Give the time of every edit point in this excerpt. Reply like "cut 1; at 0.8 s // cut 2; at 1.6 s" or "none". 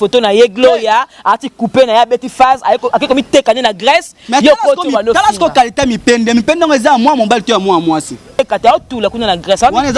cut 1; at 8.2 s